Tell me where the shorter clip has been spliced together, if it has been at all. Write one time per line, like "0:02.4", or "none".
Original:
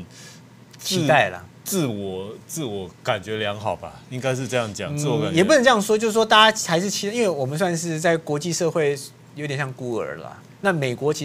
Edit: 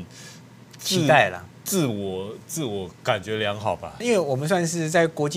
0:04.0